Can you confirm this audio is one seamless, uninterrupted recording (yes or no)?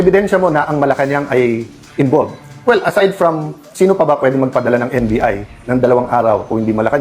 yes